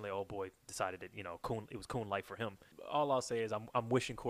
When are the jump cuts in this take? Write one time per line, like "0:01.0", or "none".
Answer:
0:02.7